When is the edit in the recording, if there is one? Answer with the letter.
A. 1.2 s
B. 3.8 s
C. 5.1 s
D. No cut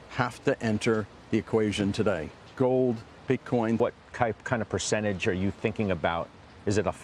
B